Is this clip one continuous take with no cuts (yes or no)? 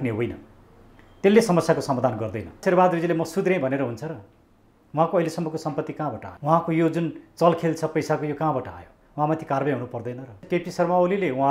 no